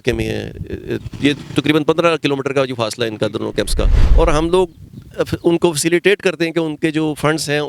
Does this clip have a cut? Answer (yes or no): yes